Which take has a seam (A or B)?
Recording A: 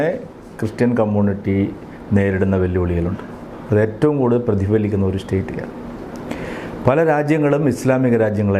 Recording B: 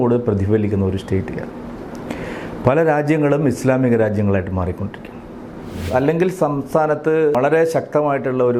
B